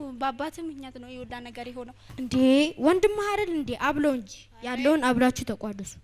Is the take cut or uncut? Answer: cut